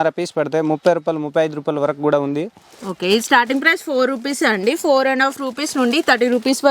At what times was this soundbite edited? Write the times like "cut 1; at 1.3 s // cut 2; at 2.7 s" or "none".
none